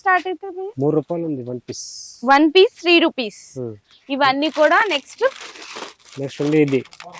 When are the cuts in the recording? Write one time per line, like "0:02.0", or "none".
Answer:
none